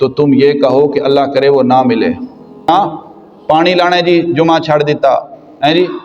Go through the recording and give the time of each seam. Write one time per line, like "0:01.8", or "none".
0:02.7